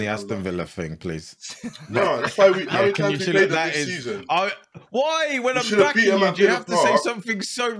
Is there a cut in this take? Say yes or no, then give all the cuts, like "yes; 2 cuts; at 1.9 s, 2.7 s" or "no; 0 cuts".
no; 0 cuts